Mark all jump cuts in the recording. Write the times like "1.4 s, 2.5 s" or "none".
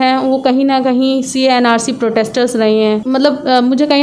3.0 s